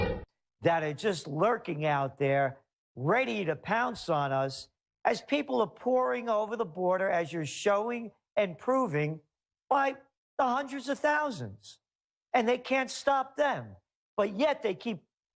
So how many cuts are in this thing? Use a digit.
1